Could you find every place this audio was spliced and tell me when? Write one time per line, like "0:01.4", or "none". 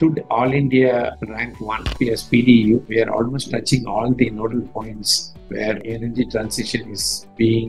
0:01.9